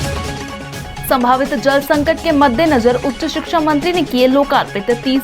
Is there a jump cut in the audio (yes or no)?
yes